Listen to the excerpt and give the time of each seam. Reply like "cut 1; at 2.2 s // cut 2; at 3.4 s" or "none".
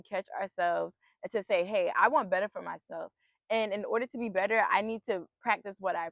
none